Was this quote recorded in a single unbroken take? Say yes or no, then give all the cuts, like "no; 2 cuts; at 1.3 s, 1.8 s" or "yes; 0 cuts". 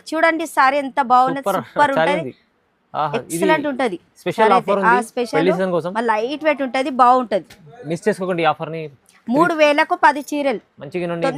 yes; 0 cuts